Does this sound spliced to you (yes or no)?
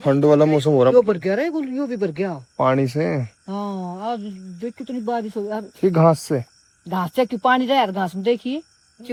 no